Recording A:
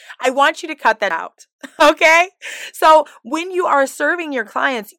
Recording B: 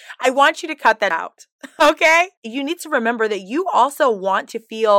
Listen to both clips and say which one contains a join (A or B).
B